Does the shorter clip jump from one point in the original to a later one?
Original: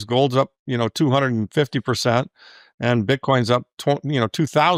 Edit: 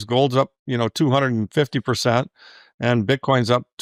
no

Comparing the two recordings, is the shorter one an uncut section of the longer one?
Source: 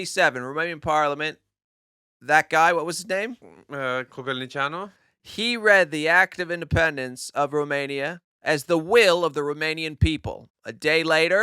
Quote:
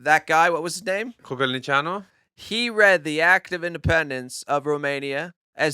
no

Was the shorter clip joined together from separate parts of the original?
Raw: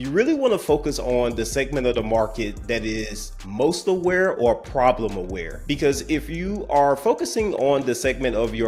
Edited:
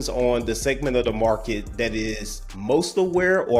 no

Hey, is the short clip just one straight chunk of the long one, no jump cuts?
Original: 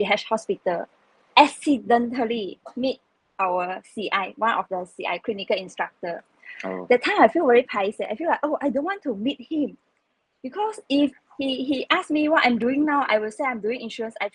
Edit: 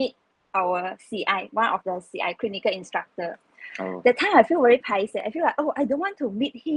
yes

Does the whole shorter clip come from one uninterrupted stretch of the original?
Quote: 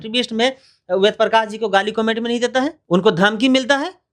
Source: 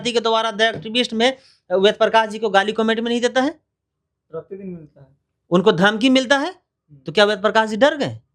no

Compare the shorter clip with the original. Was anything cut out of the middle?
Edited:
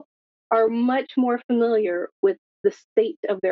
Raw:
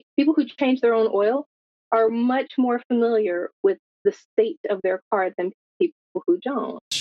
no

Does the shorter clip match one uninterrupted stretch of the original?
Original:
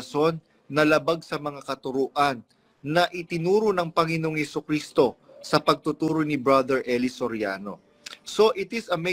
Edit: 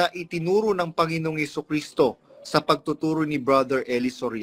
yes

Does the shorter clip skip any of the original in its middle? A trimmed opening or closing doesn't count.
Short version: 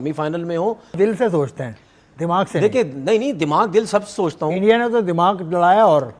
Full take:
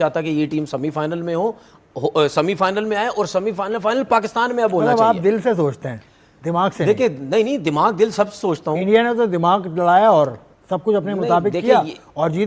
yes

